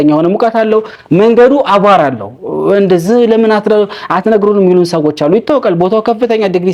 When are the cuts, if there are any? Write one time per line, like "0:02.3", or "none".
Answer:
none